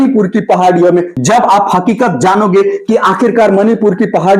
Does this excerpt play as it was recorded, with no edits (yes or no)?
no